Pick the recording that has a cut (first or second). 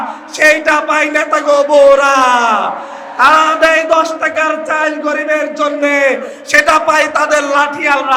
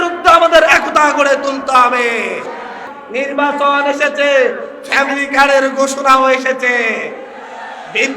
second